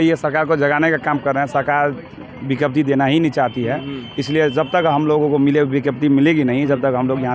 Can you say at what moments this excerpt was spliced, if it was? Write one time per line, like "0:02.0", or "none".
none